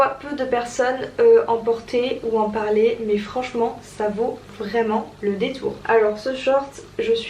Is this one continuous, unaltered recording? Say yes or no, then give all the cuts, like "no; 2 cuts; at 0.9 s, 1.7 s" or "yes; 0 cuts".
yes; 0 cuts